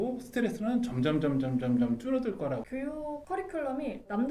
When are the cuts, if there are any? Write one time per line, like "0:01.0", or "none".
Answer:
0:02.6